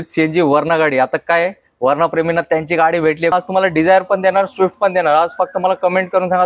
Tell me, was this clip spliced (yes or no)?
yes